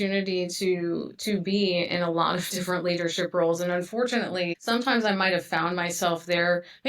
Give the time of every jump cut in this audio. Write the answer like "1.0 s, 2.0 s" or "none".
4.6 s